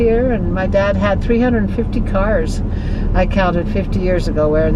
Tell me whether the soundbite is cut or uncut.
uncut